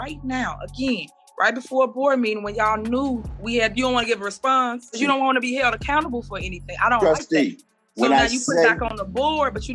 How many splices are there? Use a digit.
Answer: 1